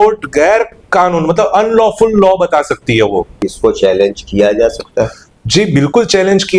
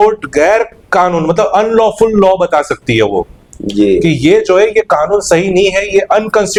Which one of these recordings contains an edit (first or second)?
first